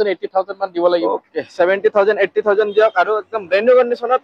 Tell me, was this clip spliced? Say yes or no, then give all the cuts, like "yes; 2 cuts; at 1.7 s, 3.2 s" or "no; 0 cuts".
no; 0 cuts